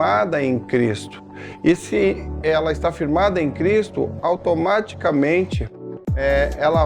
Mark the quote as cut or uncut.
uncut